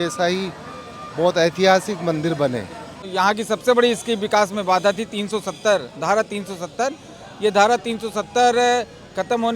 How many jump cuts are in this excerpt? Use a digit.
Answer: 1